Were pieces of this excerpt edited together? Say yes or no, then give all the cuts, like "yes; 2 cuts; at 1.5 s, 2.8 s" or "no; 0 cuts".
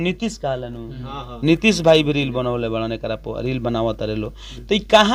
no; 0 cuts